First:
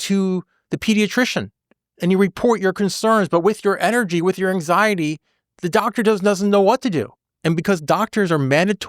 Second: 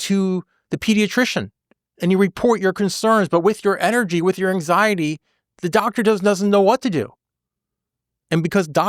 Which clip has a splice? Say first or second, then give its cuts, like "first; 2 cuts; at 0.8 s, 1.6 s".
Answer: first; 1 cut; at 7.2 s